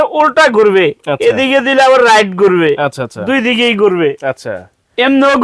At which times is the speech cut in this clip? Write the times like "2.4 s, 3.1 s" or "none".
none